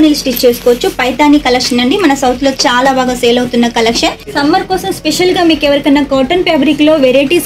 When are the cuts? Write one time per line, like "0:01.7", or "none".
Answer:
0:04.2

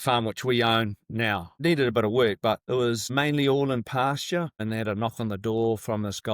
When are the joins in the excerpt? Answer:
0:01.5
0:02.9
0:04.6

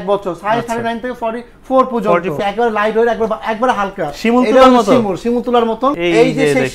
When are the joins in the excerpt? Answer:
0:02.4
0:06.0

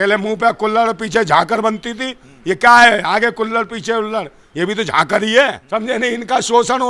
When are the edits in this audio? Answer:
0:05.6

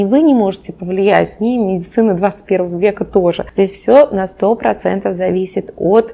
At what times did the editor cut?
0:03.4

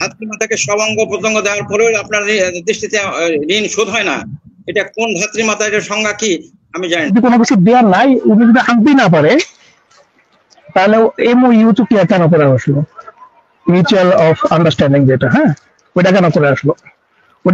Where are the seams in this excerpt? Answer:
0:07.1

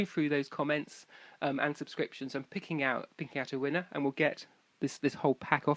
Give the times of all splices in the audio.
none

